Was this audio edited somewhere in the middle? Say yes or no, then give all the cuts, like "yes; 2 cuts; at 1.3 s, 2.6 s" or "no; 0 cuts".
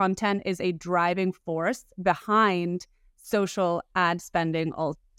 no; 0 cuts